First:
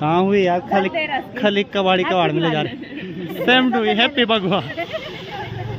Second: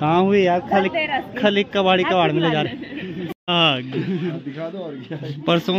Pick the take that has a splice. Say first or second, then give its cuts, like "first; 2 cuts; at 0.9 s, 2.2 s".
second; 1 cut; at 3.3 s